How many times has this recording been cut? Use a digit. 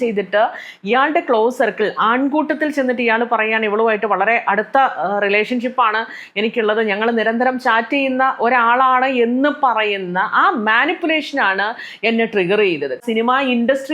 1